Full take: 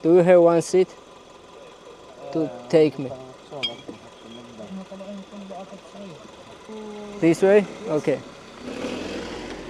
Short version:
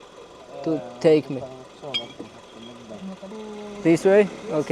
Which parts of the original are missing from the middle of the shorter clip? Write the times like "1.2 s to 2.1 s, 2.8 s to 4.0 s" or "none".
5.0 s to 6.7 s